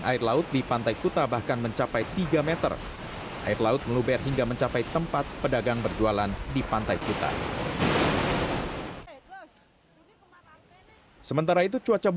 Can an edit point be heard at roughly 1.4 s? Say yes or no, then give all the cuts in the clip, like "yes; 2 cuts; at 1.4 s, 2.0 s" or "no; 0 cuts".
yes; 1 cut; at 1.4 s